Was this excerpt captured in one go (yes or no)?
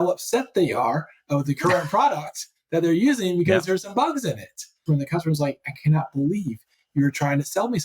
no